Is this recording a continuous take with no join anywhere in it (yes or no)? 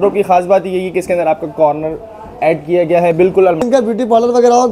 no